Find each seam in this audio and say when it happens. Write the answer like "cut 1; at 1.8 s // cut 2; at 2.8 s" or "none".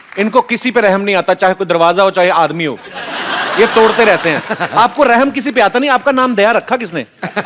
none